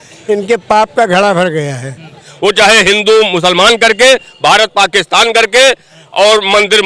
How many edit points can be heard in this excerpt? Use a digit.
1